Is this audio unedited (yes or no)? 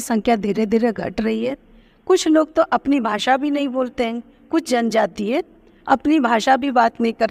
yes